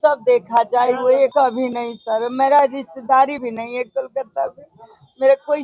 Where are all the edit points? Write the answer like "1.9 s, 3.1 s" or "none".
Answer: 1.3 s